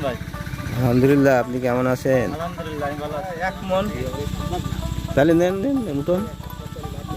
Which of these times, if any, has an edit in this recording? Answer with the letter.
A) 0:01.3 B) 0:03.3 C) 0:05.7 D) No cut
B